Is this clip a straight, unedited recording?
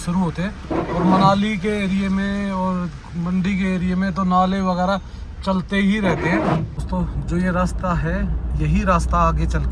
no; 1 cut; at 6.8 s

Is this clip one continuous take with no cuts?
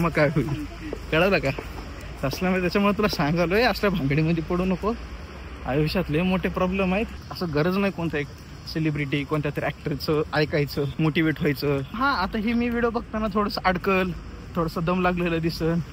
no; 3 cuts; at 7.2 s, 10.9 s, 12.0 s

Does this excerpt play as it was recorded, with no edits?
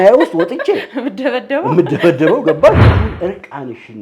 no; 1 cut; at 2.9 s

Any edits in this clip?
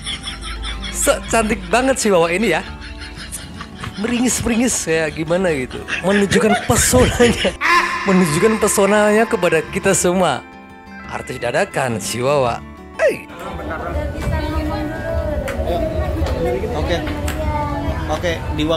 no; 0 cuts

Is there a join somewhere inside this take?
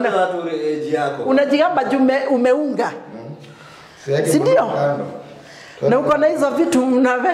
no; 0 cuts

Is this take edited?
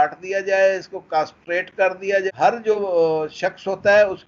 yes; 1 cut; at 2.2 s

